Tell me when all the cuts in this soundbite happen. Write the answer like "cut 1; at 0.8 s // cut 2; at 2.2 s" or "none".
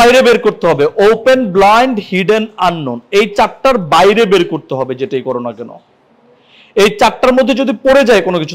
none